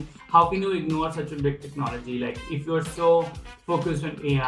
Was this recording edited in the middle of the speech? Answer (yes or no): no